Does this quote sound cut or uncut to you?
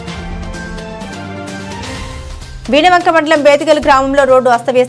uncut